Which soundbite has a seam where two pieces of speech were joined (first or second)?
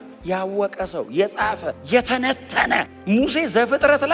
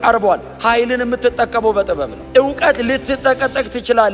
first